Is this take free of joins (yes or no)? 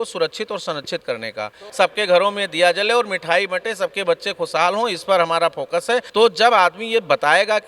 no